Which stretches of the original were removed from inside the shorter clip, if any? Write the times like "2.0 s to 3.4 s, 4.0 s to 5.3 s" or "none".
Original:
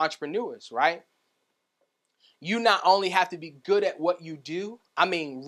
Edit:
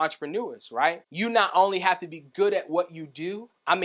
1.1 s to 2.4 s